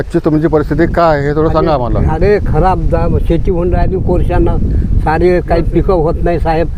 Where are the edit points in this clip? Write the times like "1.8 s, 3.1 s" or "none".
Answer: none